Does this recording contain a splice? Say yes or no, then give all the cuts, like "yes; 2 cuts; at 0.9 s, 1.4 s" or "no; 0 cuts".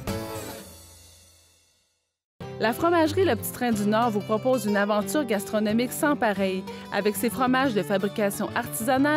yes; 1 cut; at 2.2 s